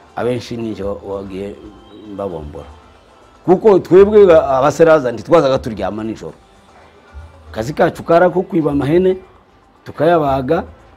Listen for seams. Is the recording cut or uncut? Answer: uncut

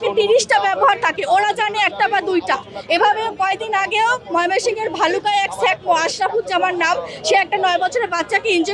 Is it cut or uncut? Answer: uncut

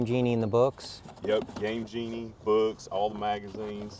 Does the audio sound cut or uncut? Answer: uncut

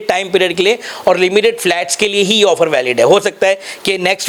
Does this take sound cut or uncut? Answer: uncut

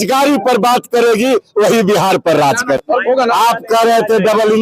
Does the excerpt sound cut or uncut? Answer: cut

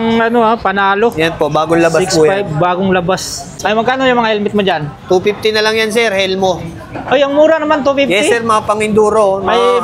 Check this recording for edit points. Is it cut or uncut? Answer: cut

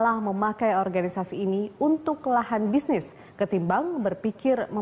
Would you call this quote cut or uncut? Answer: cut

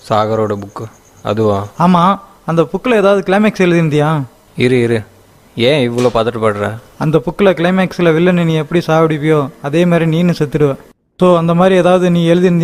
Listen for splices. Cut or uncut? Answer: uncut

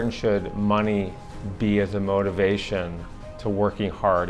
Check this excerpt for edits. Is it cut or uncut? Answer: uncut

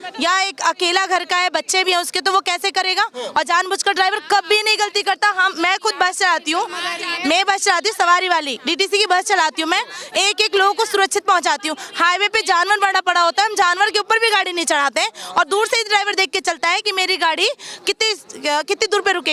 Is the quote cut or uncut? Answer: uncut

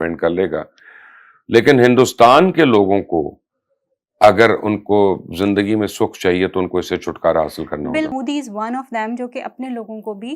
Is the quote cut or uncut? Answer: cut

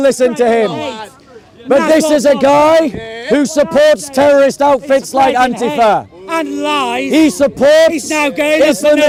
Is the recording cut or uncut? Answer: uncut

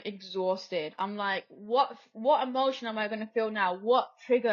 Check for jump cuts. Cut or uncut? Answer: uncut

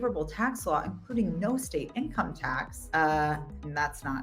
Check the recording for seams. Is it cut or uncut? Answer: cut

